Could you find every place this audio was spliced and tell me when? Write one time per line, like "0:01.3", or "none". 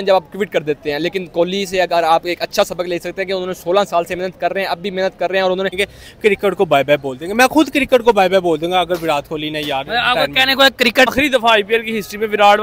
0:05.8
0:11.1